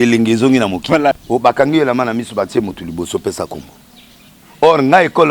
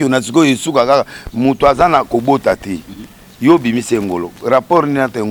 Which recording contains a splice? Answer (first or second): first